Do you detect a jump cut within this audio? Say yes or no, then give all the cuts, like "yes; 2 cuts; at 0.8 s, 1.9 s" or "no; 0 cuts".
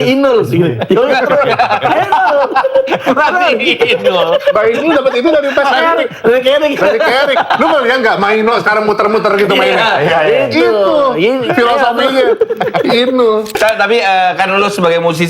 yes; 1 cut; at 13.5 s